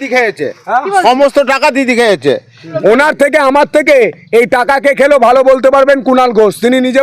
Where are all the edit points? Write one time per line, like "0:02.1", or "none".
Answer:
0:02.7